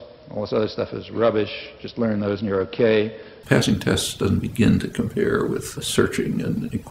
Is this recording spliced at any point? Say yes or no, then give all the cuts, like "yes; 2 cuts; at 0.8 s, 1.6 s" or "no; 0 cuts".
yes; 2 cuts; at 3.3 s, 5.7 s